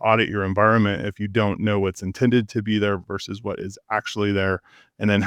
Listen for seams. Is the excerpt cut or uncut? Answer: uncut